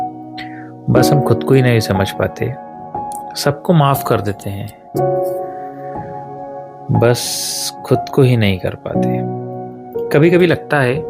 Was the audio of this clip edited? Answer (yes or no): yes